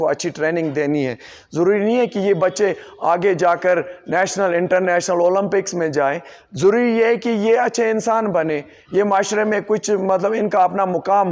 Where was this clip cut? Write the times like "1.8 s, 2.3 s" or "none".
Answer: none

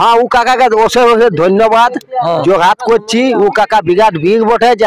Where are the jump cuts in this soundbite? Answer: none

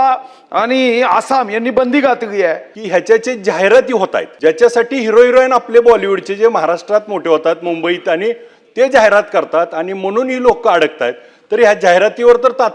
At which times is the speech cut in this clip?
2.7 s, 4.2 s

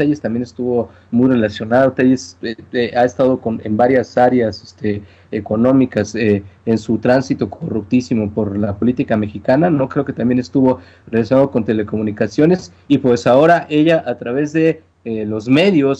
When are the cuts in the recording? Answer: none

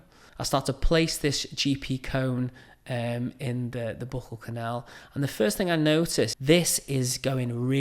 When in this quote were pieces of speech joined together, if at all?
6.4 s

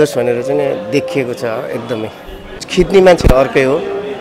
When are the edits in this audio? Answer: 2.6 s

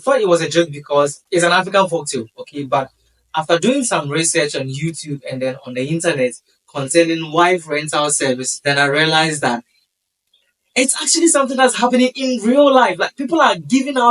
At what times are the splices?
1.2 s

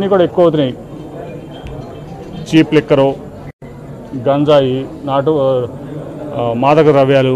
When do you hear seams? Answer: none

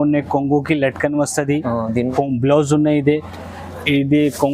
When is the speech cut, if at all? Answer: 2.1 s

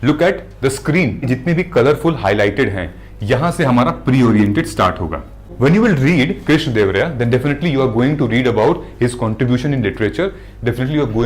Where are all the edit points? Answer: 1.3 s, 5.5 s

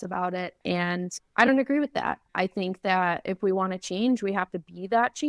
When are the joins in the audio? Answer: 1.1 s

